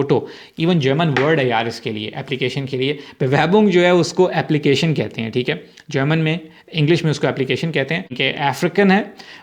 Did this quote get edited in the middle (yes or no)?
yes